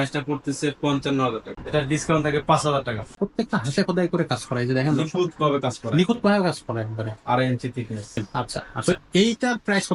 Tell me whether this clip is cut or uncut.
cut